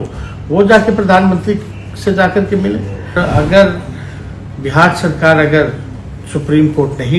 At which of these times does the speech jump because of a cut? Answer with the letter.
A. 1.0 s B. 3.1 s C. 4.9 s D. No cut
B